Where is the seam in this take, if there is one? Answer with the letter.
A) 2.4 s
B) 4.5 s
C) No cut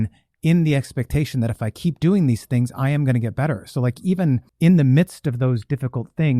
B